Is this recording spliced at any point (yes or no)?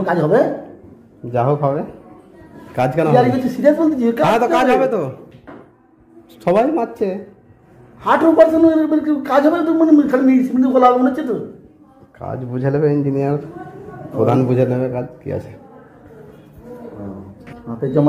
yes